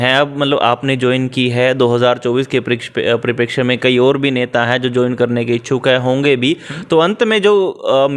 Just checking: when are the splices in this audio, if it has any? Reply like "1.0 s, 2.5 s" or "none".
none